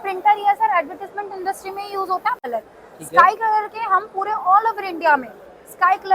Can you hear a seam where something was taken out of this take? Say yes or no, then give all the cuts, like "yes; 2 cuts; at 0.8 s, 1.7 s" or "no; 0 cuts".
yes; 1 cut; at 2.4 s